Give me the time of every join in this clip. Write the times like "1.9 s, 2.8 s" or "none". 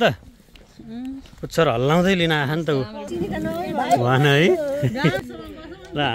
3.0 s, 5.2 s